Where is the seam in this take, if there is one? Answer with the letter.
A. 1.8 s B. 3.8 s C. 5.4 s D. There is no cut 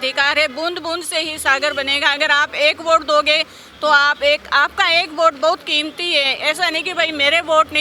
D